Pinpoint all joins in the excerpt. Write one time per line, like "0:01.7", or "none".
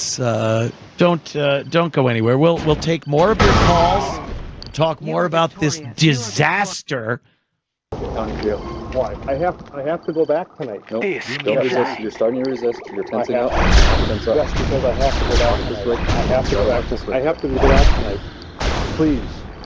0:08.0